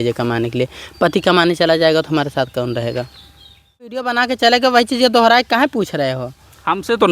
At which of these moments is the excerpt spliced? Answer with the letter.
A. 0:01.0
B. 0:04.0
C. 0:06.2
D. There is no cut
B